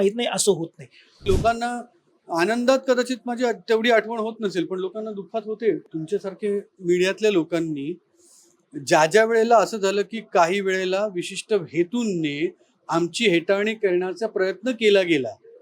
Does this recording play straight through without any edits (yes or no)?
no